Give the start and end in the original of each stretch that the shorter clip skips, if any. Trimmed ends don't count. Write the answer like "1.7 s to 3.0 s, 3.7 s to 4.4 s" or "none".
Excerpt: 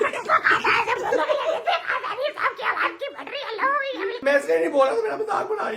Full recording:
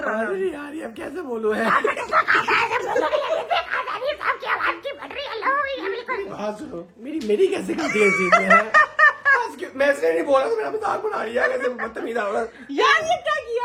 6.0 s to 9.7 s